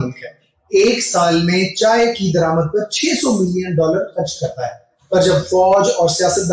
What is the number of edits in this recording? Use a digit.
1